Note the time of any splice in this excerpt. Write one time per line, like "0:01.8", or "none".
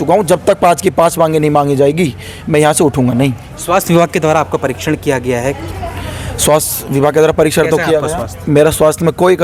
none